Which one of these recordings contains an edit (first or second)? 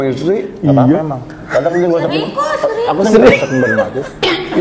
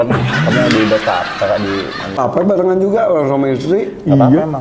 second